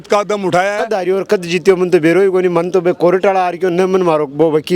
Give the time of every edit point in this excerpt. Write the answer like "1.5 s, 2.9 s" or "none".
0.9 s